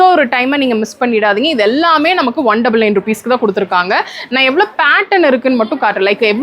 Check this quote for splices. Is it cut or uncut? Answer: uncut